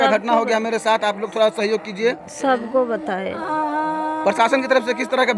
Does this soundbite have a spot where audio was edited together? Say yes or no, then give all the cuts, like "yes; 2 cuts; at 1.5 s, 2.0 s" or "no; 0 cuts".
no; 0 cuts